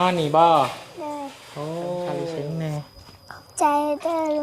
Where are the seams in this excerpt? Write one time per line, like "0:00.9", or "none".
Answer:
0:02.4